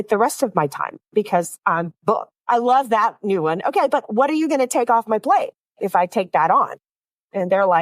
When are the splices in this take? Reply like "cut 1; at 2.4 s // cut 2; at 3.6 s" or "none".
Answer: cut 1; at 2.3 s